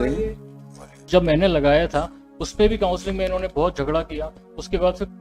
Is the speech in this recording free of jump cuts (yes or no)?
no